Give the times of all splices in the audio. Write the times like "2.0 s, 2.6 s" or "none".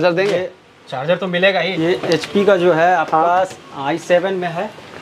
1.7 s